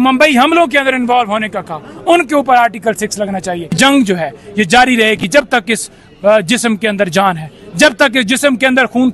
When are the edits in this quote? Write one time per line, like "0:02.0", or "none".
0:03.7